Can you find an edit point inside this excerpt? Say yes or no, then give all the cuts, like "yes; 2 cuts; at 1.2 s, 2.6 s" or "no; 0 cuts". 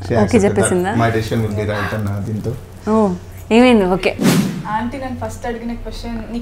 yes; 1 cut; at 4.3 s